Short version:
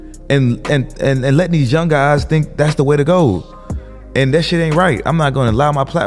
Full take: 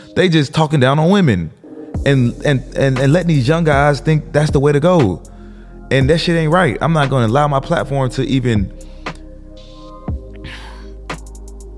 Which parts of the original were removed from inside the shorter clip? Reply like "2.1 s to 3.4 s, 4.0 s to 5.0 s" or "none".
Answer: none